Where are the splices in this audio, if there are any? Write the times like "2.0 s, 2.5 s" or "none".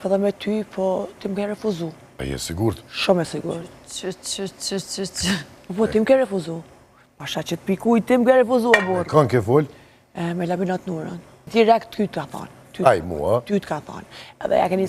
2.1 s, 11.4 s